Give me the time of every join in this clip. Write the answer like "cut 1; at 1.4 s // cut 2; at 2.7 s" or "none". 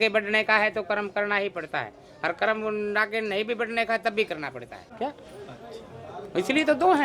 cut 1; at 4.9 s